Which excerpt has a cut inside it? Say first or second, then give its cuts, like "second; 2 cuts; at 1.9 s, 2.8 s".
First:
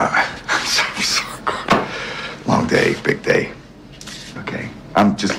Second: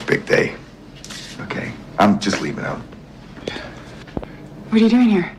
second; 1 cut; at 3.9 s